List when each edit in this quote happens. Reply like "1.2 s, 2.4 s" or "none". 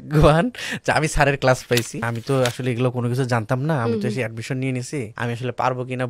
2.0 s, 5.1 s